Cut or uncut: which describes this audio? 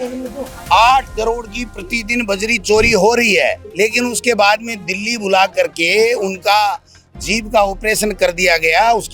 cut